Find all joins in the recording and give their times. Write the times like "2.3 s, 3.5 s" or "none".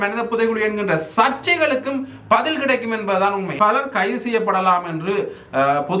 3.5 s